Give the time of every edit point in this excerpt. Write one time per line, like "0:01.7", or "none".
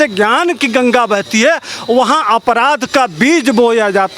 none